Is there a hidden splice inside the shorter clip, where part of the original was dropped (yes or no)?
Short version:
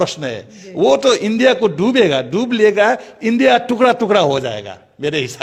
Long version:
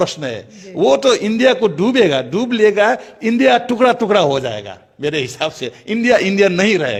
no